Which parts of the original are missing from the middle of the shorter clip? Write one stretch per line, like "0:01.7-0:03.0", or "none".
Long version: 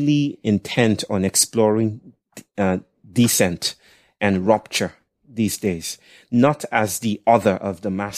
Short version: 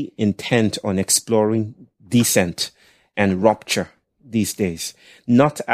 0:02.2-0:03.0